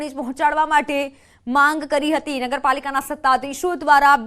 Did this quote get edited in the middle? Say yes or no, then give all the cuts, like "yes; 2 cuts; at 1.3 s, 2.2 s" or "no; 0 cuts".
yes; 1 cut; at 2.6 s